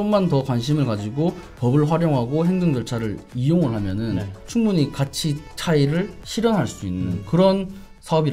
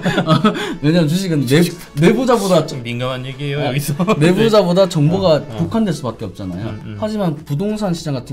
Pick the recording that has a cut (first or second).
first